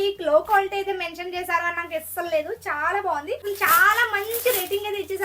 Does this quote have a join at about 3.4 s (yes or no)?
yes